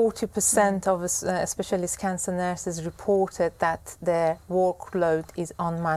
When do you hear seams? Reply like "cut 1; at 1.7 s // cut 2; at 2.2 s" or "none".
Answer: none